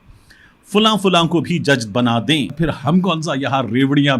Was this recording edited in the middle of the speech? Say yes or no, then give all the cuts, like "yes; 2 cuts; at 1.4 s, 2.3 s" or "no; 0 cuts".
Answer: yes; 1 cut; at 2.6 s